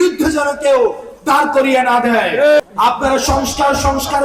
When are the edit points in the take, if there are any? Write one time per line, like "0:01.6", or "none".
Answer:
0:02.7